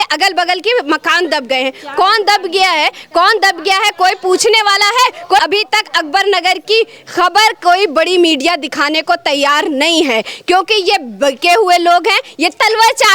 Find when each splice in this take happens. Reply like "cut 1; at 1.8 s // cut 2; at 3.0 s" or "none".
cut 1; at 5.4 s